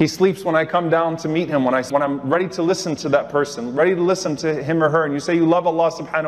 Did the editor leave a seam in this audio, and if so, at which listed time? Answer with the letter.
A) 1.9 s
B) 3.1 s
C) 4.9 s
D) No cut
A